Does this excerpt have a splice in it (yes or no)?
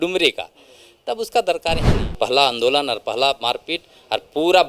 yes